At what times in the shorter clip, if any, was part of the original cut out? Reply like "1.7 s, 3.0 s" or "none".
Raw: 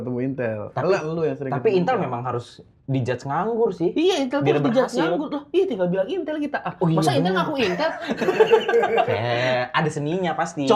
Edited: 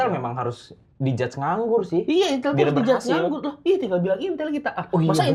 none

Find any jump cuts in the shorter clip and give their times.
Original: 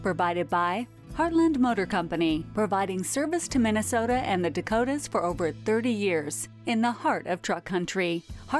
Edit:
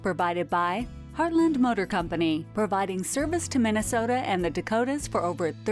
none

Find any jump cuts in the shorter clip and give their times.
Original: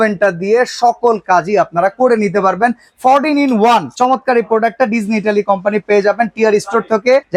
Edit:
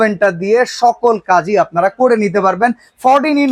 none

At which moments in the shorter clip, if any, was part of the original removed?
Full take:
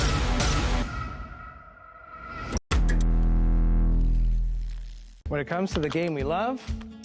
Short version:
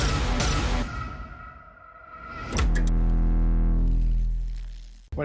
2.6 s

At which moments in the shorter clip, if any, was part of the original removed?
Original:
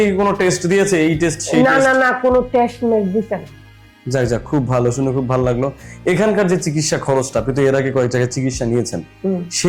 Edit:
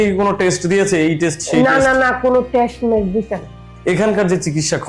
3.7 s

